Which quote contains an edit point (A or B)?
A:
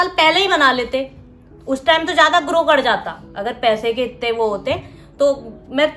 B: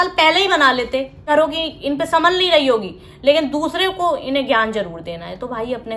B